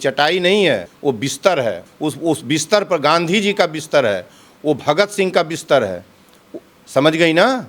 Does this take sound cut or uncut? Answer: cut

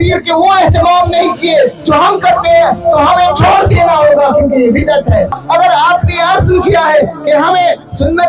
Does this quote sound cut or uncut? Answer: cut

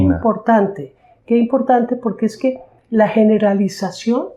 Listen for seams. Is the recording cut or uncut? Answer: uncut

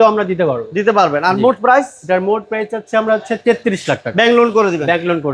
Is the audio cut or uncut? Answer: uncut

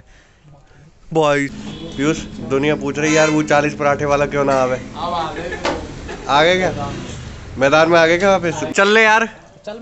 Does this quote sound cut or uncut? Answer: cut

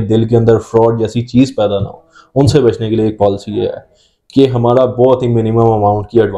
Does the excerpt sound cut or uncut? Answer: uncut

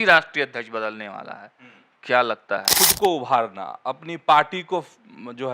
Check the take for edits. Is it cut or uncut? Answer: cut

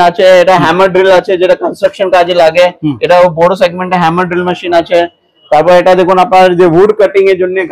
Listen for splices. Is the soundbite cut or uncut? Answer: uncut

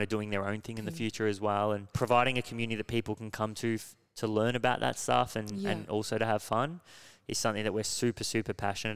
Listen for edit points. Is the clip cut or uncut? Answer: cut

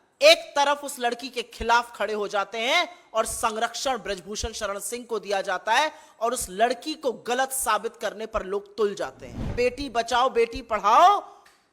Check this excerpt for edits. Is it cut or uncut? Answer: cut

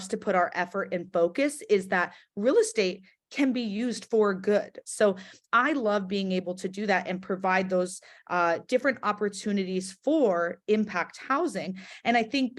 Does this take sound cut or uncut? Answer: cut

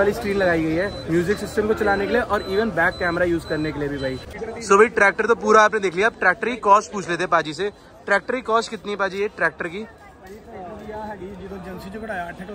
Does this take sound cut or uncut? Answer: cut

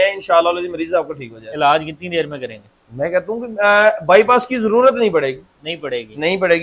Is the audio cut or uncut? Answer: uncut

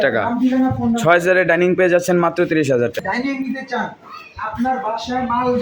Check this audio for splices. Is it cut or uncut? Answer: cut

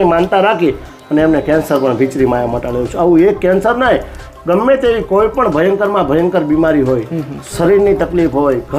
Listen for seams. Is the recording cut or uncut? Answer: uncut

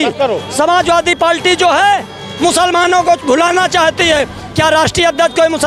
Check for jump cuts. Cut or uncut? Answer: uncut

